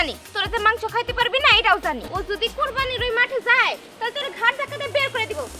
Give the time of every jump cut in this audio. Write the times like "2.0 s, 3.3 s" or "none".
2.1 s

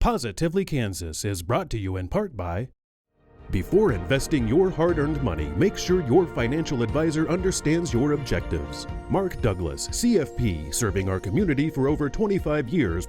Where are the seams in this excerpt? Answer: 2.8 s

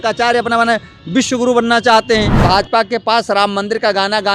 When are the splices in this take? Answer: 2.4 s

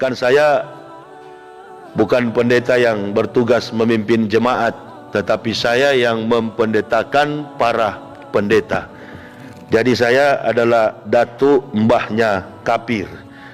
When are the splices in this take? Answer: none

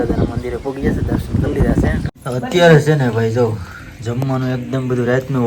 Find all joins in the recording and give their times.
2.0 s

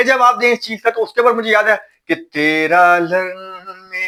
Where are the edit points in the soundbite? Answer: none

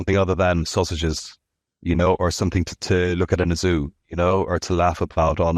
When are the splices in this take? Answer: none

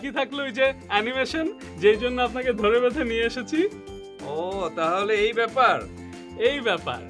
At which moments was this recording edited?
none

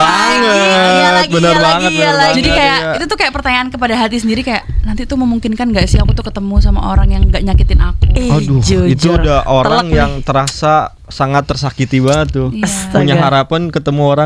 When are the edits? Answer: none

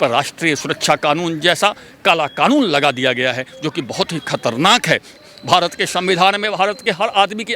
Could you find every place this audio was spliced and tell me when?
5.1 s

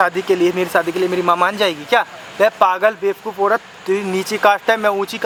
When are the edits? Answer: none

